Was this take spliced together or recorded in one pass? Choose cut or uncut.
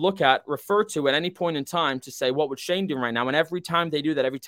uncut